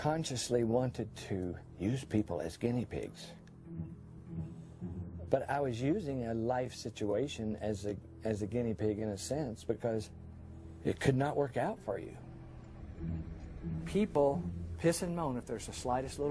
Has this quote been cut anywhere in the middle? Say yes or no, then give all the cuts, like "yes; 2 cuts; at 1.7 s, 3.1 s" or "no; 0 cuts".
yes; 1 cut; at 9.6 s